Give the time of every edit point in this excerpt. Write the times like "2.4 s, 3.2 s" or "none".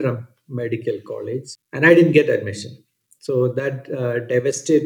1.5 s